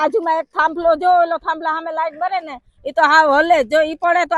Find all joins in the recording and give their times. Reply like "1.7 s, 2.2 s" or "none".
none

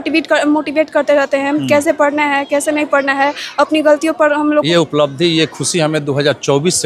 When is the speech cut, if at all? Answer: 4.7 s

